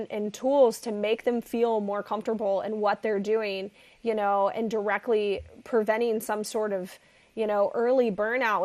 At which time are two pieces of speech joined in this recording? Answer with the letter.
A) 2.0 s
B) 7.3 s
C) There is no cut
C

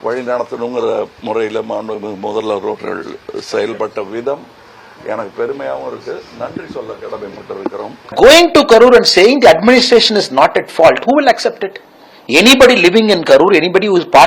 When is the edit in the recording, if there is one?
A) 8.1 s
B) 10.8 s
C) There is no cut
A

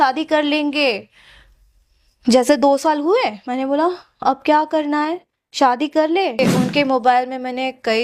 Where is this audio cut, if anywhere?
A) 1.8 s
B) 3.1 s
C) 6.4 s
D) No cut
C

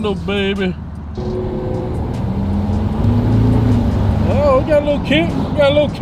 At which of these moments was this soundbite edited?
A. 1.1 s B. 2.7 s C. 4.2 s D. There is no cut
A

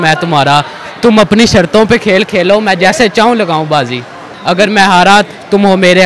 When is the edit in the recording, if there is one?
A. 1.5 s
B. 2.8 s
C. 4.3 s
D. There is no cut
C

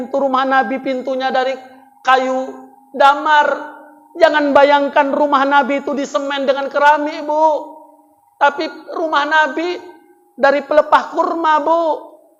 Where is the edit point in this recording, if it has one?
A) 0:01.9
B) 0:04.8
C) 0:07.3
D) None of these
D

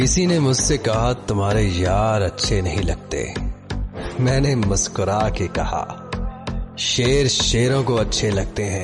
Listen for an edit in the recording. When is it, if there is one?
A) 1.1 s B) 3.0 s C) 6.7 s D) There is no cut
D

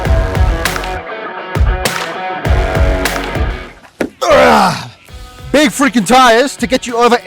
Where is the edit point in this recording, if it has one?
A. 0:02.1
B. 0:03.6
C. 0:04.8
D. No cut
B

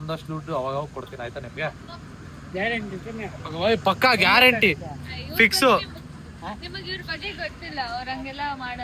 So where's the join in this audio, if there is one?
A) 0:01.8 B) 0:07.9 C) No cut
C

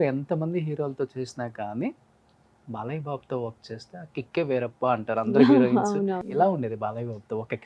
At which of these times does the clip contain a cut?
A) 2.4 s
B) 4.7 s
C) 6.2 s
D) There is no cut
C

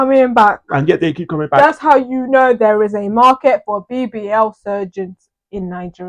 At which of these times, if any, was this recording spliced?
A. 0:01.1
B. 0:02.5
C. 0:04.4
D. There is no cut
D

